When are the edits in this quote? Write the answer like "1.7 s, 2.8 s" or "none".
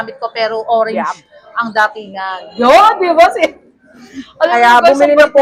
none